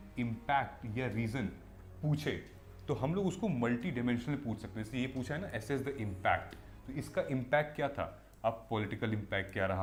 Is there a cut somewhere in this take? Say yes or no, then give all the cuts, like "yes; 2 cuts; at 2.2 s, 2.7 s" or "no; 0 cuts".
no; 0 cuts